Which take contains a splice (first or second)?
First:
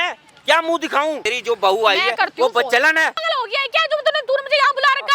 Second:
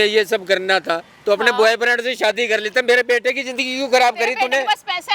first